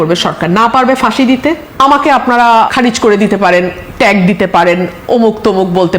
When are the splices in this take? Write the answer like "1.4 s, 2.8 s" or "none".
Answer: 1.6 s, 2.7 s